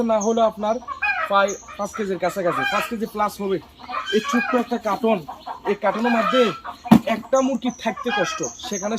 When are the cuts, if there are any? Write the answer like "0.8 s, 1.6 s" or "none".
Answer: 3.8 s